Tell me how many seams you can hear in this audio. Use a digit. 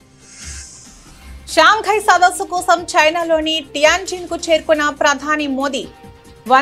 1